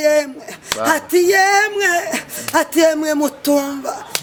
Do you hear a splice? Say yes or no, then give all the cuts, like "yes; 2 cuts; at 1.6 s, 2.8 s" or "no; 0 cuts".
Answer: no; 0 cuts